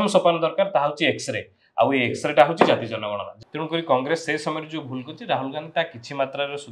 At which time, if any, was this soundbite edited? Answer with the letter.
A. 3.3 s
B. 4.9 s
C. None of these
A